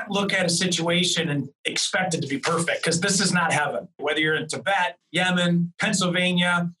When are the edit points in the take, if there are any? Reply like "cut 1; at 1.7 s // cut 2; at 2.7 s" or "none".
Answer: cut 1; at 4.0 s // cut 2; at 5.0 s // cut 3; at 5.7 s